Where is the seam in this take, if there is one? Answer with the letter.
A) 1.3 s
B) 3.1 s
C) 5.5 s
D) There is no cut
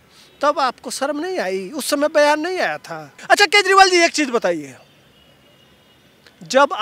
B